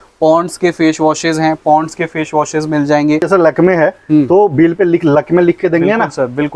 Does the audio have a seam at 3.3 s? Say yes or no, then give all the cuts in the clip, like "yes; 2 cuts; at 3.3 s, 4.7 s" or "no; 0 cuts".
yes; 1 cut; at 3.3 s